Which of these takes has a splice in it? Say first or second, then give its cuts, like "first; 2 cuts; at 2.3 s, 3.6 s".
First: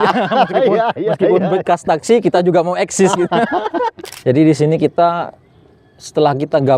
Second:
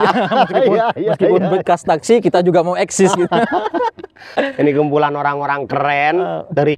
first; 1 cut; at 4.1 s